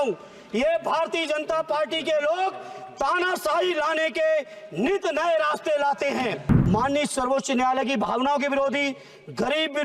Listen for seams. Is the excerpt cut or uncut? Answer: cut